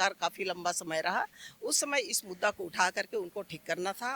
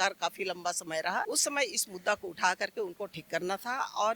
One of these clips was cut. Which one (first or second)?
second